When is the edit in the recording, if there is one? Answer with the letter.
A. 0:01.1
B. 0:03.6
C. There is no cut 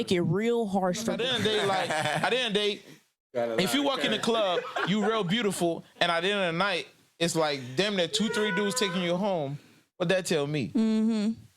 A